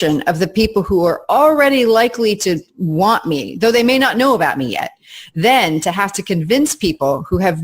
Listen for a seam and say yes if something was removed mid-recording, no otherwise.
no